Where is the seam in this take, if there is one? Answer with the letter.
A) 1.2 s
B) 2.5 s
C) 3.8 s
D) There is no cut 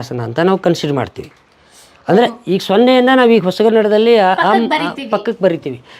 D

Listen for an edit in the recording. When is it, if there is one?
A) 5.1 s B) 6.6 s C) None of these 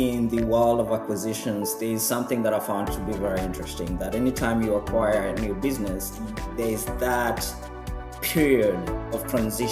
C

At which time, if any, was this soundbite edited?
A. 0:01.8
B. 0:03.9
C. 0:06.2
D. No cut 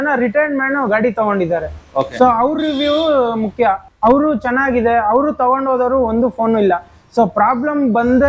B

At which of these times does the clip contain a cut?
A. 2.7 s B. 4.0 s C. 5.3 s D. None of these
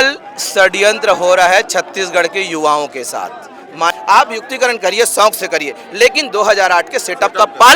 B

